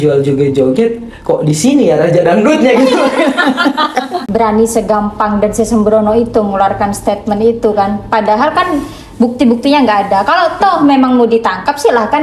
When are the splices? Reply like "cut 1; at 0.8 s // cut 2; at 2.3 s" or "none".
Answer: cut 1; at 4.1 s